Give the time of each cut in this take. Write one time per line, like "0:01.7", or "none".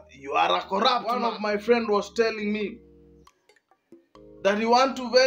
0:01.3

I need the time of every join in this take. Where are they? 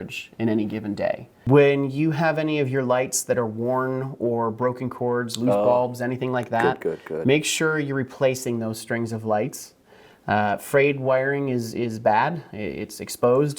0:01.3

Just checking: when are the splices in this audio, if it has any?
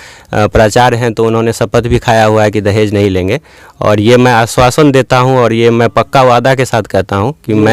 none

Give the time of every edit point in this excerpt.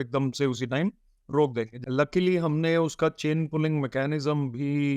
0:01.7

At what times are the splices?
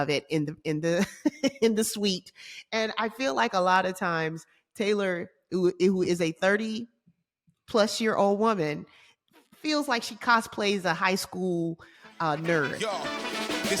0:12.7

